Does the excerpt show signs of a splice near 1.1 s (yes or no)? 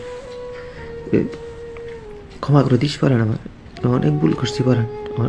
no